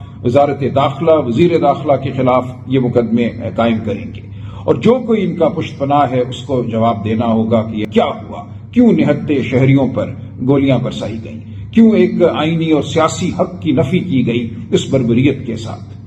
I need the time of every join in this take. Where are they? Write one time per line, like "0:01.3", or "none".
0:07.9